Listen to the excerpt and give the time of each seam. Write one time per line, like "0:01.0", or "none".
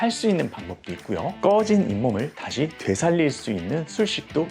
0:01.4